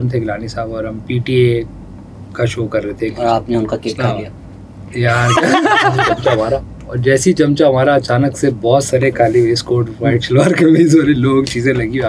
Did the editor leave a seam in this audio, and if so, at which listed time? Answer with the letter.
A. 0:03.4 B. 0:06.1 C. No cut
B